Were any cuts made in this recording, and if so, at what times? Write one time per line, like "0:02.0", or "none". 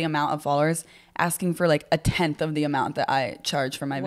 none